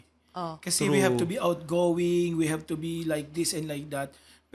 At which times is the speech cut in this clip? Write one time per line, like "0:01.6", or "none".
none